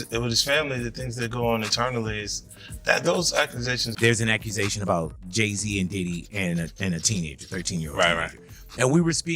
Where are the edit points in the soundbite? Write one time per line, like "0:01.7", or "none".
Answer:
0:03.9